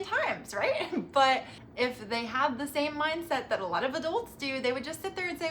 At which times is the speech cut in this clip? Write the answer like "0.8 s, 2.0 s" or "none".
none